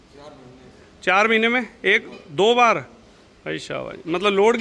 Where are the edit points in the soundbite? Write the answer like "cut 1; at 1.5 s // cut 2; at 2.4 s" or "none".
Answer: none